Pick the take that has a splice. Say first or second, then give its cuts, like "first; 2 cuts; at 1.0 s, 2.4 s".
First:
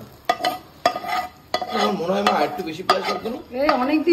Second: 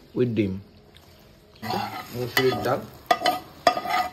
second; 1 cut; at 1.7 s